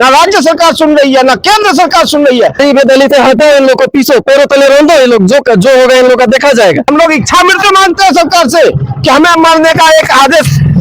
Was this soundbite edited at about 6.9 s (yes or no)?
yes